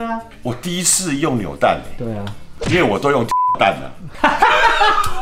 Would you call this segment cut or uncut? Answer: uncut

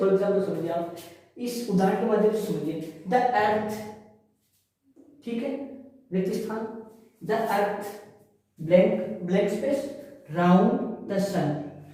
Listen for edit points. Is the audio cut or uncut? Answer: uncut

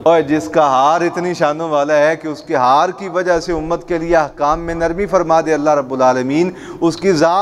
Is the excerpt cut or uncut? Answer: uncut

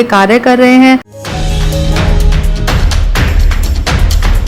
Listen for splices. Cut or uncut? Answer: cut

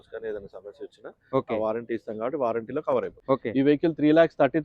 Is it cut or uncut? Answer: cut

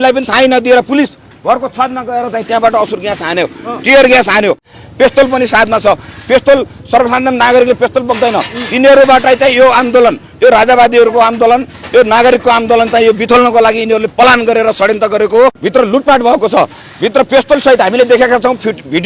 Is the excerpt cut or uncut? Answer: cut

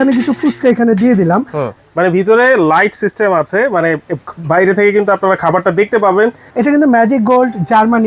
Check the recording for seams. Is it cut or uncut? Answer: cut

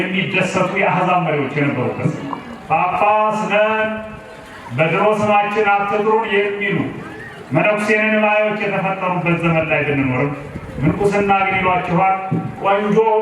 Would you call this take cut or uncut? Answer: cut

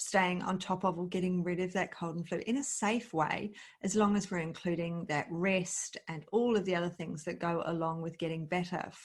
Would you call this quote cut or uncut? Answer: uncut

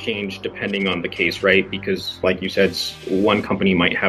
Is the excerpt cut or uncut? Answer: cut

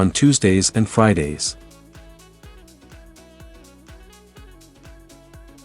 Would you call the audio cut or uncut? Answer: uncut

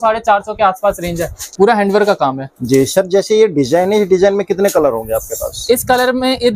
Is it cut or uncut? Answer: cut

